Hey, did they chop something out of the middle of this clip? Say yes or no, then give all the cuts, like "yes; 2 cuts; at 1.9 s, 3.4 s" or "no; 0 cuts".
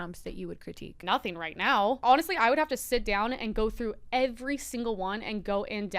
yes; 2 cuts; at 1.0 s, 2.0 s